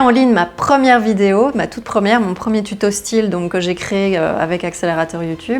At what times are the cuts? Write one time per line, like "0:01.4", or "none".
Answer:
none